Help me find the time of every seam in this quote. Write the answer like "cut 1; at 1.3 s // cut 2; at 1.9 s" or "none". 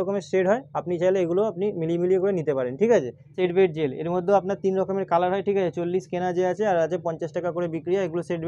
none